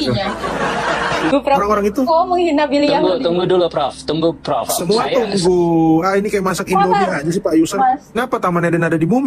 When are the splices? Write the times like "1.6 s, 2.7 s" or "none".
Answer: 1.3 s, 8.1 s